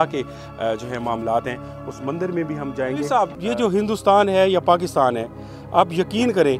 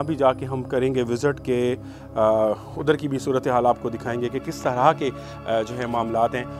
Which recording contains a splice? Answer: first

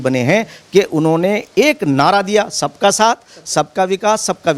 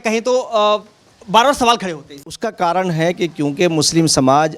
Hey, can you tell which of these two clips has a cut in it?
second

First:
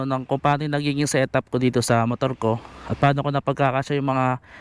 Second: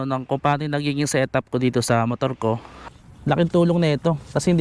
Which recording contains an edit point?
second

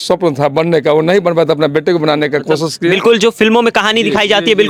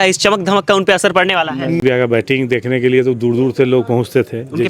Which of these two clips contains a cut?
second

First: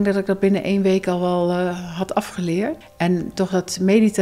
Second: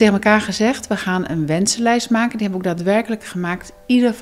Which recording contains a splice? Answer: first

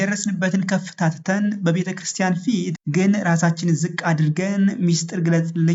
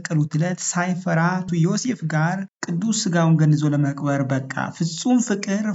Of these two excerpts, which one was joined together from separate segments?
second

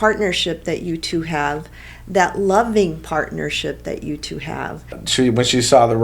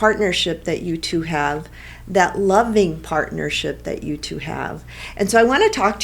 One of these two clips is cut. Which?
first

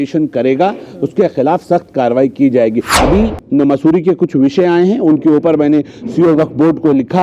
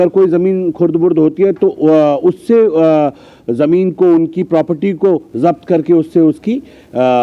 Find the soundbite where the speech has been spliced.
first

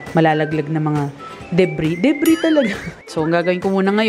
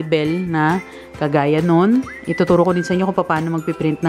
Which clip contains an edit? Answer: first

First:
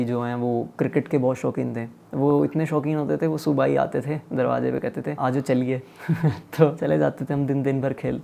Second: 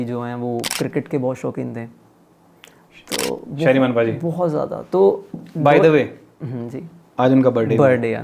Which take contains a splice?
first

